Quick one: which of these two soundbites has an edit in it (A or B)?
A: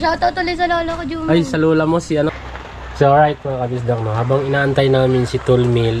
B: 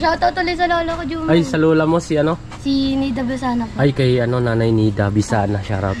A